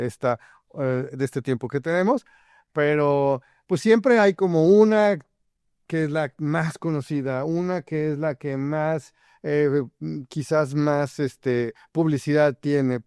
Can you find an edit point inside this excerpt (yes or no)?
no